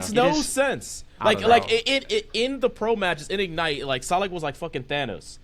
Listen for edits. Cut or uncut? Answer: uncut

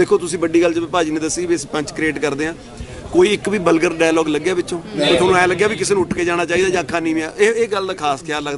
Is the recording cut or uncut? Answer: uncut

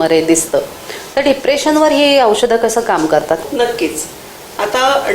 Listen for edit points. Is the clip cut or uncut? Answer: cut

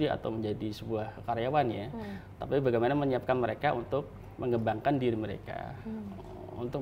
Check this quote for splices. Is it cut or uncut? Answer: cut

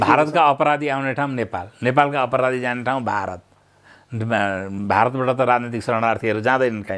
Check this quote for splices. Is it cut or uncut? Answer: uncut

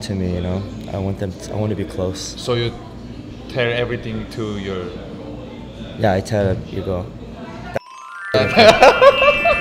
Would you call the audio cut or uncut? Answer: uncut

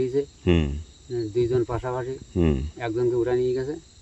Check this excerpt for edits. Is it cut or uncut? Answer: uncut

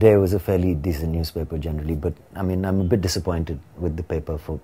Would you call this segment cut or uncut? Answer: uncut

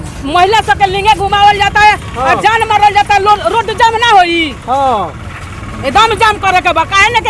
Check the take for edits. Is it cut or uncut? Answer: uncut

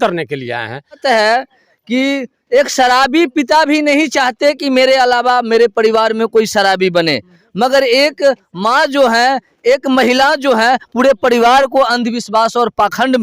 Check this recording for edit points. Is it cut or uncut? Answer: cut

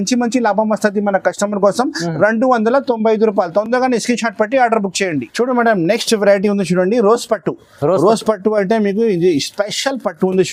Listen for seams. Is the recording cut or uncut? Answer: uncut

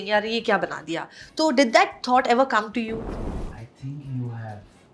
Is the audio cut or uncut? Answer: cut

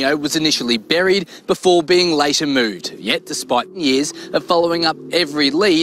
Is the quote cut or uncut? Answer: uncut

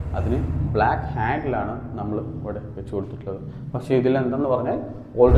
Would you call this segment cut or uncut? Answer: uncut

